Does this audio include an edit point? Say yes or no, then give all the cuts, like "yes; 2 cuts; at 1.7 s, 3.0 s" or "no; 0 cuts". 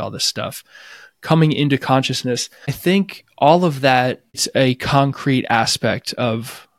yes; 2 cuts; at 2.8 s, 4.4 s